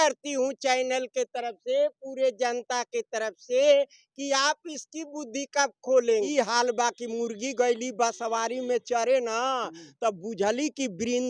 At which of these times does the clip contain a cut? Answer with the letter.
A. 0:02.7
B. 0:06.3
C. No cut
B